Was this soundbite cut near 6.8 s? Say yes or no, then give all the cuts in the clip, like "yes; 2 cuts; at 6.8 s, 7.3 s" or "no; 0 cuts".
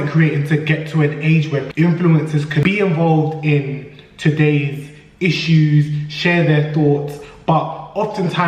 no; 2 cuts; at 1.7 s, 2.6 s